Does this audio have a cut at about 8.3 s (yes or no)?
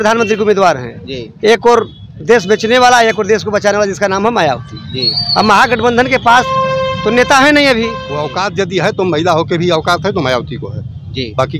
yes